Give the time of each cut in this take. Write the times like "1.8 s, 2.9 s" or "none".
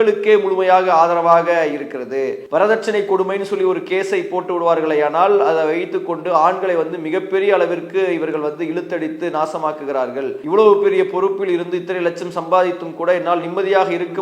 2.4 s, 10.4 s